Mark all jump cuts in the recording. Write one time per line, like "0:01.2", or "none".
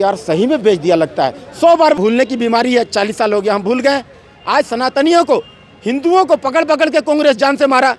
0:02.0